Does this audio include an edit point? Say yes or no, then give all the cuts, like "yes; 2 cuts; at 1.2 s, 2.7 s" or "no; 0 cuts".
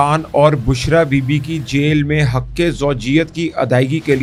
no; 0 cuts